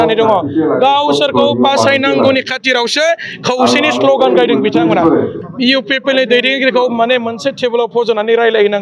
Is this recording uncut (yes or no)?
no